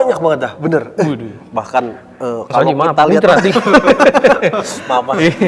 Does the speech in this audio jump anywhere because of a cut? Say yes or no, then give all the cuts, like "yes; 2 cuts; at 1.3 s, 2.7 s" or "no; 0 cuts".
no; 0 cuts